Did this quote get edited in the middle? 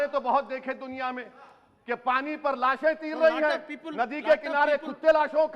no; 0 cuts

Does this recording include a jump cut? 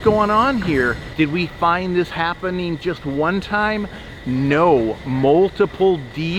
yes; 1 cut; at 1.1 s

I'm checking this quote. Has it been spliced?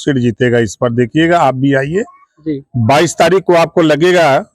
no; 0 cuts

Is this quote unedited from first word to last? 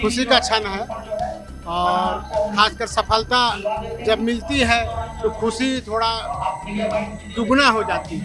yes; 0 cuts

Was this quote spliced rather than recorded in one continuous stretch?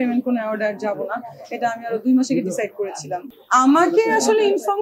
no; 0 cuts

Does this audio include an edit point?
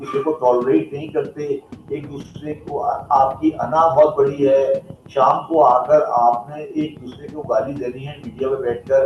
no; 0 cuts

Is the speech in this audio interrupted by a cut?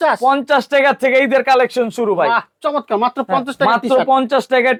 no; 0 cuts

